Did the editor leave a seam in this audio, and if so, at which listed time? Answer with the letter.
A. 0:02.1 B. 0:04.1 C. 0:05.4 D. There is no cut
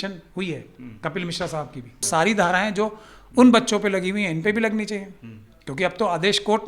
A